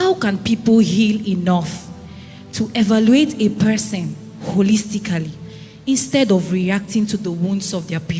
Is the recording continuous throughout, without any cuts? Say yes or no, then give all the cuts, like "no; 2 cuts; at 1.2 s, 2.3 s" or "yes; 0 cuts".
yes; 0 cuts